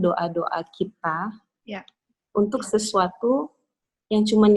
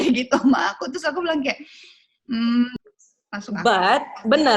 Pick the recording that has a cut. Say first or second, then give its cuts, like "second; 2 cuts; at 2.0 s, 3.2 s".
second; 1 cut; at 2.7 s